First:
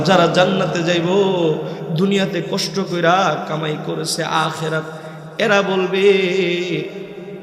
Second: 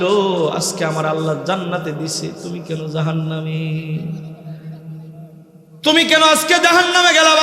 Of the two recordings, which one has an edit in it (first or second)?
second